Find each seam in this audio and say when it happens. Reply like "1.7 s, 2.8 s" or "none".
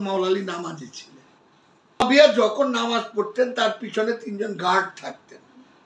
2.0 s

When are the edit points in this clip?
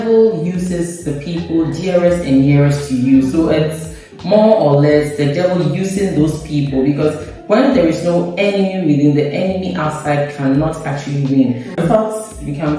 11.8 s

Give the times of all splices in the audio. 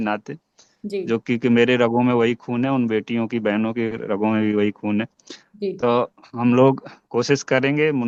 none

